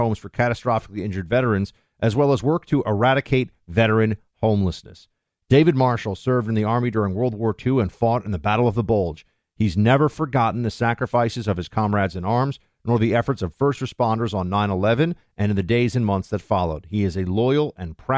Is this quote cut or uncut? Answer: uncut